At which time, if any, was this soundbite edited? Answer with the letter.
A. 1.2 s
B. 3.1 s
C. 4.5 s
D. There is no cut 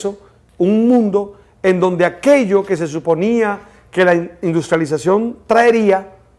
C